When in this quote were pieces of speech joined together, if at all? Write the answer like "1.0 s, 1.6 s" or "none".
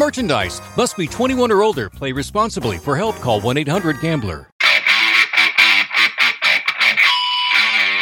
4.5 s

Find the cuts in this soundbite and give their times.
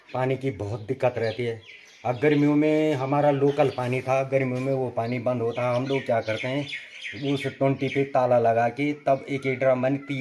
none

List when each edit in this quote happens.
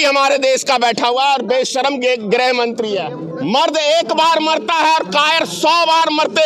3.2 s

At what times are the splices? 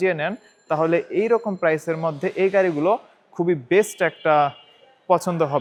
none

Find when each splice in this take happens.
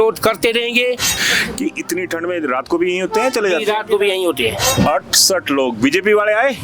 1.1 s, 4.8 s

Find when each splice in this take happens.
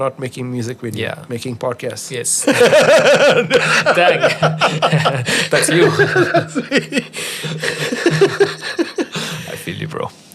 none

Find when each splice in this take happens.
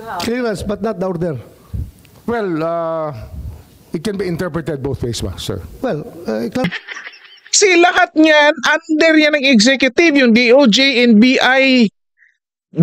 6.7 s

